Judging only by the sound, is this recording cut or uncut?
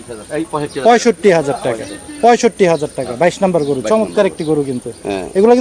uncut